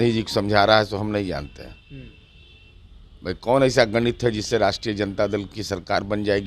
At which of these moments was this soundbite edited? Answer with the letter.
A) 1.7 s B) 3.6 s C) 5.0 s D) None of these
D